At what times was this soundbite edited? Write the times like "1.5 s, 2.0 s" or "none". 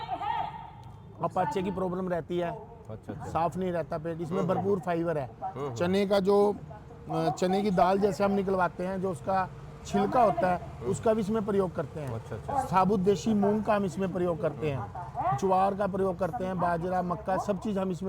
none